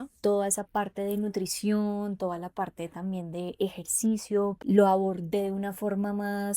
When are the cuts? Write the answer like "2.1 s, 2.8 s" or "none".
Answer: 4.6 s